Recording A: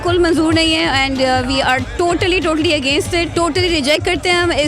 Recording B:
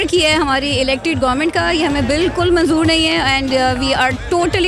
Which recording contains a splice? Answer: A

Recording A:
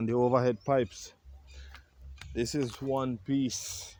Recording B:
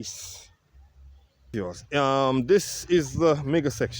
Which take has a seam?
B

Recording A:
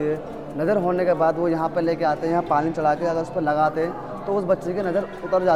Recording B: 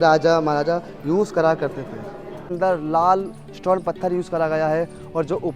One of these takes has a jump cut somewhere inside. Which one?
B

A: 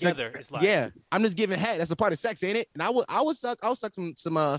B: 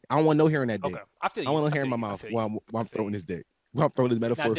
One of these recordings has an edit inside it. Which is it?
B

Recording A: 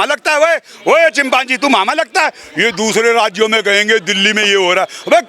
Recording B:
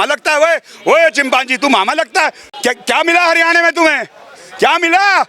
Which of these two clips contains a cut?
B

